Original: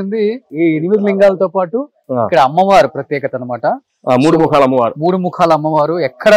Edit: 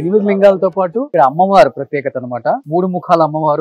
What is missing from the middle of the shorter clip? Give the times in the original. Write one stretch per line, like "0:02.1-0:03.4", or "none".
0:01.9-0:02.3
0:03.8-0:05.0